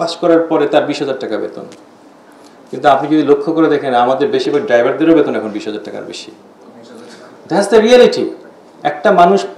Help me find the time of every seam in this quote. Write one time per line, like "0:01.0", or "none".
none